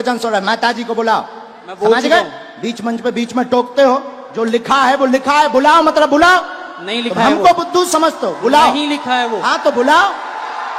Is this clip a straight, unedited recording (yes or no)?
yes